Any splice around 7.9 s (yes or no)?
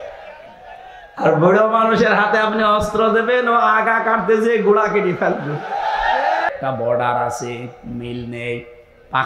no